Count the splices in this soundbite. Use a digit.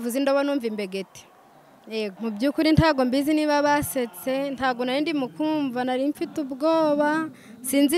1